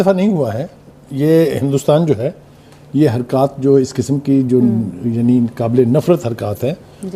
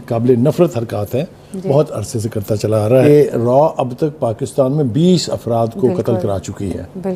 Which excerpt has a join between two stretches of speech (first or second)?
second